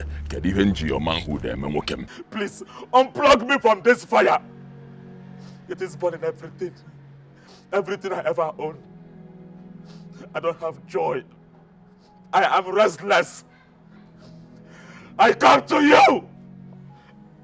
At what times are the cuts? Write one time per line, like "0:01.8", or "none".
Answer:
0:02.1